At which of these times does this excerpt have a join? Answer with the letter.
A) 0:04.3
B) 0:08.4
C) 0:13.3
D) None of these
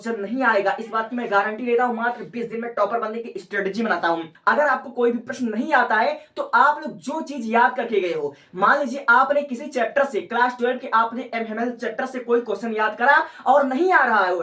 A